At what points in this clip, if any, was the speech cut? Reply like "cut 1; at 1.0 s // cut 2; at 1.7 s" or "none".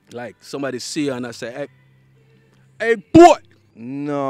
none